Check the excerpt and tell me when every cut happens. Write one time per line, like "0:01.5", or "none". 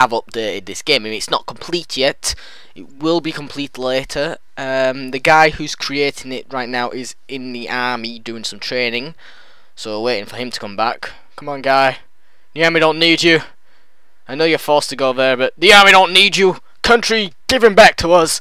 0:07.2